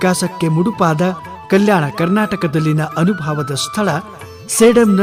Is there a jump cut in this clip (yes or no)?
no